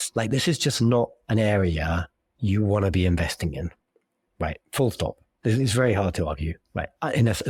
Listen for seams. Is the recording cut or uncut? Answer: uncut